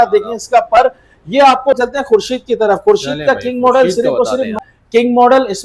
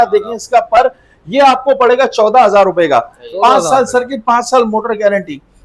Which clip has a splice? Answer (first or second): first